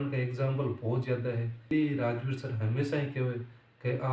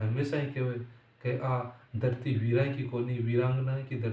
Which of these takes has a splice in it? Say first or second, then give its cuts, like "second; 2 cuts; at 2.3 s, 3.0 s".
first; 1 cut; at 1.7 s